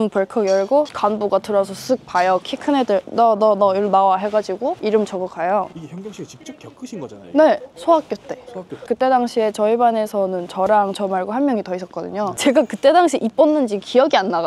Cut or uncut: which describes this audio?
cut